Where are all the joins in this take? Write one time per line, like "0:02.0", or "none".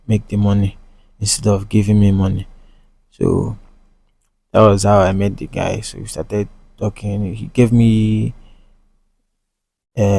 none